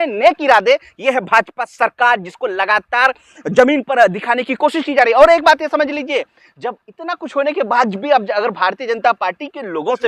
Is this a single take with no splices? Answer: yes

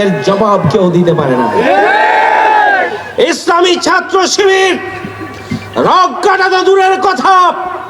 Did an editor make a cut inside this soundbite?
no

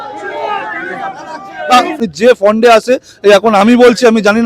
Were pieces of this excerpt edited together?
yes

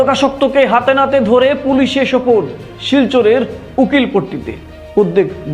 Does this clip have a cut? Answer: no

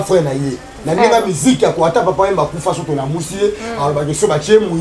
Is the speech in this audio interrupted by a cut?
no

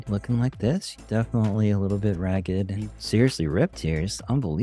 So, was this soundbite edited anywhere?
yes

